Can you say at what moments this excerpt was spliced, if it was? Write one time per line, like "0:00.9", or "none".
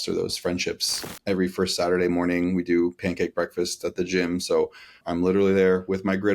0:01.2

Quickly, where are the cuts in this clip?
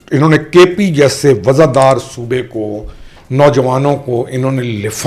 none

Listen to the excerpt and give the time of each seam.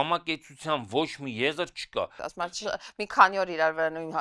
0:02.2

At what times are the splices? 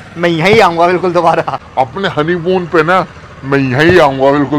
none

